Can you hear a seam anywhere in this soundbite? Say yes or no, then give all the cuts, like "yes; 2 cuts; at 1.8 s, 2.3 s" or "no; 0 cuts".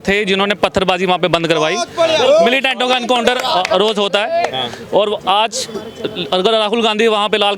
no; 0 cuts